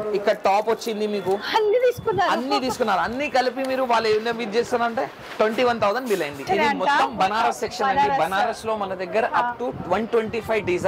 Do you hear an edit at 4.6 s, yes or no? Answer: no